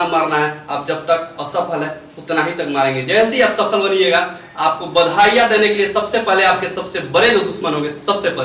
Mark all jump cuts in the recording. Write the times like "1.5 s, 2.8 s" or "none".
none